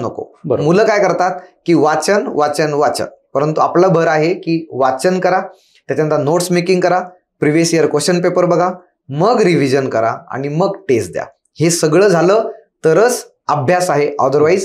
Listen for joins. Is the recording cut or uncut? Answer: uncut